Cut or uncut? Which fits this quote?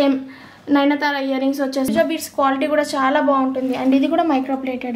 cut